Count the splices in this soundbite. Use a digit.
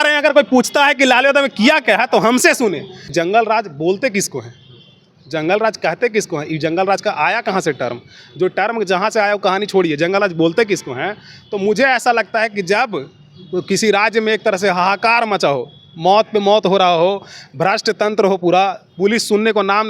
1